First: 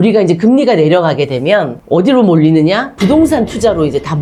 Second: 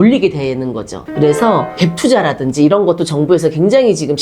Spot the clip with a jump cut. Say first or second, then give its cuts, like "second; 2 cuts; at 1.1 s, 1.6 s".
second; 1 cut; at 1.0 s